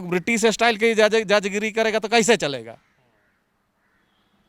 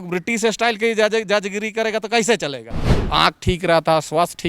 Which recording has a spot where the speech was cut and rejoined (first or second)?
second